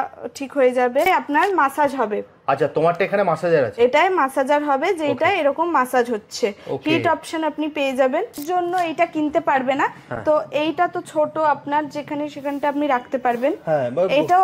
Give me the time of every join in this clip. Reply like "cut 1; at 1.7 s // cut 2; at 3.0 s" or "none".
cut 1; at 1.1 s // cut 2; at 8.4 s